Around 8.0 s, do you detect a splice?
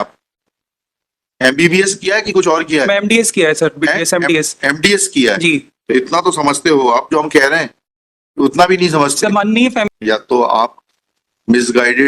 no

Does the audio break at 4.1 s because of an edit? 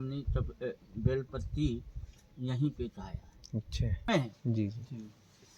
yes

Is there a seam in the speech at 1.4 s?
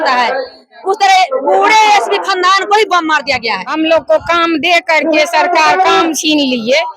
no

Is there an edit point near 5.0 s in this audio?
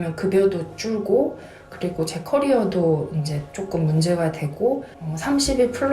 yes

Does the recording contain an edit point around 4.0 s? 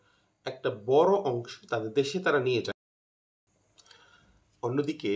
no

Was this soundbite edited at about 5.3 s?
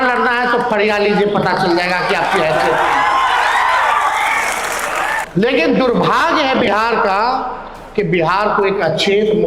yes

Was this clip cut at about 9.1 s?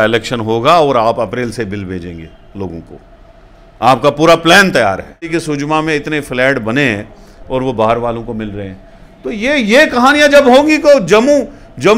no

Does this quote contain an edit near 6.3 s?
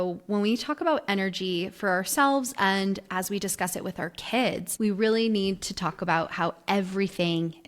no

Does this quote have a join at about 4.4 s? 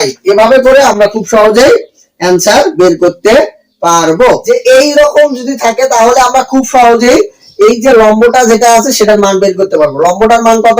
yes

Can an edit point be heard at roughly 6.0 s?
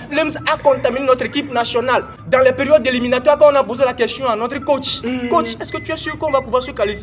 no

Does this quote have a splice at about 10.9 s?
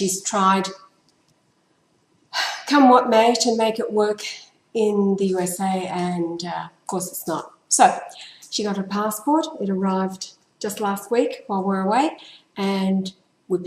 yes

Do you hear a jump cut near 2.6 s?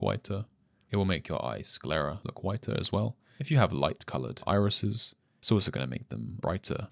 no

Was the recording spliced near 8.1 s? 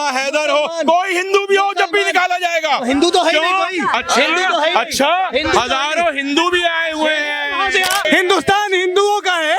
yes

